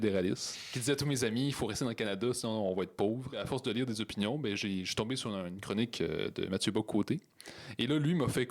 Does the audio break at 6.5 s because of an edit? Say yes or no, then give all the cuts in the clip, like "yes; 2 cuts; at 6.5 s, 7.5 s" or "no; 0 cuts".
no; 1 cut; at 3.4 s